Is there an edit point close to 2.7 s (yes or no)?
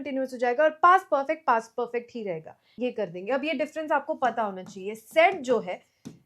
yes